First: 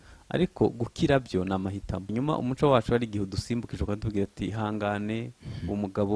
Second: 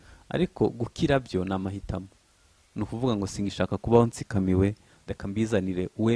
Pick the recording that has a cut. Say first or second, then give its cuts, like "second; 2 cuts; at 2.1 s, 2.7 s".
first; 1 cut; at 2.1 s